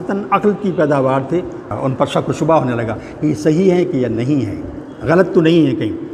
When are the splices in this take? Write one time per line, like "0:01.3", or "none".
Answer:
0:01.7